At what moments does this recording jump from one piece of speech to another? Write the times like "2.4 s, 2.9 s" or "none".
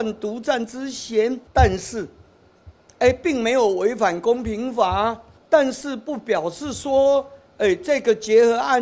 1.4 s, 5.3 s